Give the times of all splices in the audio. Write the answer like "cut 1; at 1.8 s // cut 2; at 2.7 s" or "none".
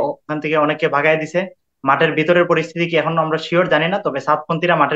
none